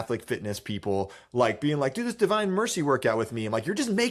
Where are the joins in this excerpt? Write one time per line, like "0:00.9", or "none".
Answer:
none